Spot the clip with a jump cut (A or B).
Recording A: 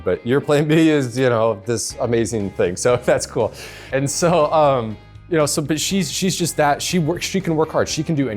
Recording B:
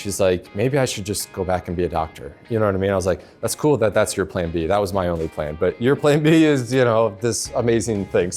A